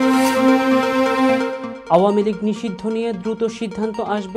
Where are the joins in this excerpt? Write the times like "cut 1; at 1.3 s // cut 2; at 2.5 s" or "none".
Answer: none